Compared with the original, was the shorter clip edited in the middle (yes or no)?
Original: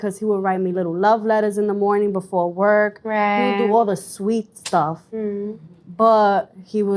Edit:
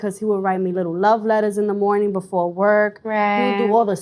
no